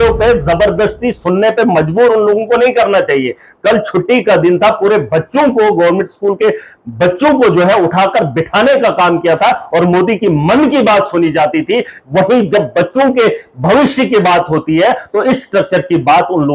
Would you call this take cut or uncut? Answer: uncut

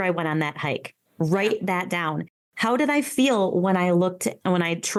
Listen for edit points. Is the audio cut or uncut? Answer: uncut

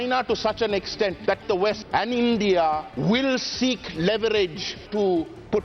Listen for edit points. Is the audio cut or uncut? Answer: cut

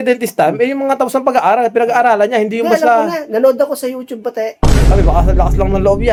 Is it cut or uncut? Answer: uncut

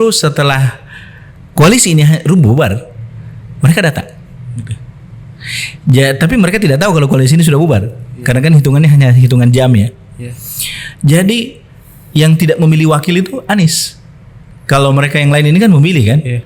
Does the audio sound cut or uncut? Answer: uncut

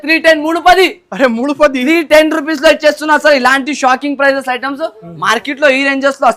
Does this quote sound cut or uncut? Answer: uncut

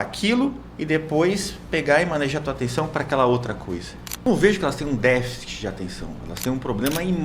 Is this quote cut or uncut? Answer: cut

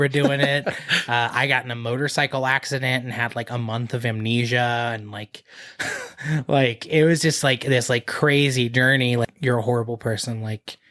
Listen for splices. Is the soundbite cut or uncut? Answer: cut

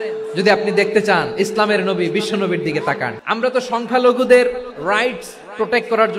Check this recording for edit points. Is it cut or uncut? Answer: cut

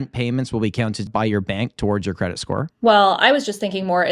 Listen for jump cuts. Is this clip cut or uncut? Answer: cut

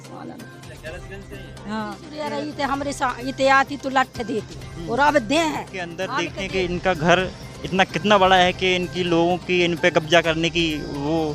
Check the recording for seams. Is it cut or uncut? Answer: cut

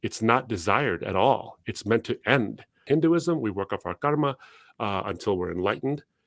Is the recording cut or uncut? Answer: cut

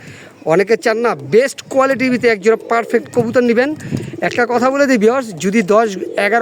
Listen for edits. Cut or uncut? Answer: uncut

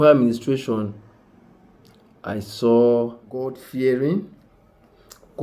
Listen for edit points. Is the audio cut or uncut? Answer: cut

